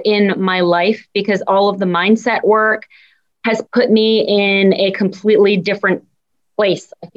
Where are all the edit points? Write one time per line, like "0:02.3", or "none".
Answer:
none